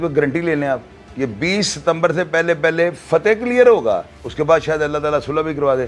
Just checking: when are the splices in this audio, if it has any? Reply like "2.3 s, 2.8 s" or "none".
none